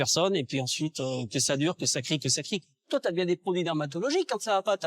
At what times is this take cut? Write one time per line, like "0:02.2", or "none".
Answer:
0:02.7

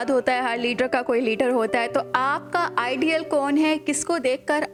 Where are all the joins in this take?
none

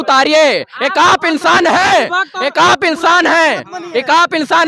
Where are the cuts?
none

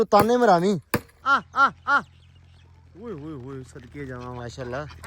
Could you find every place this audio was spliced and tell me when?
0:01.2

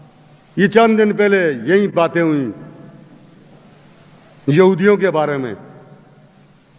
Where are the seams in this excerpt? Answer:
0:01.9

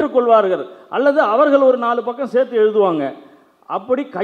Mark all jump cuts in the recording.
none

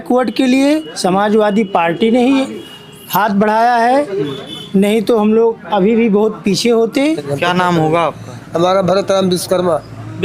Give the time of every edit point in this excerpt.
0:07.3

